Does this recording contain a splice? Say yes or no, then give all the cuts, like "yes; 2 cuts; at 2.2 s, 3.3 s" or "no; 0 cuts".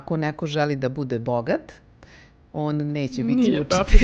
no; 0 cuts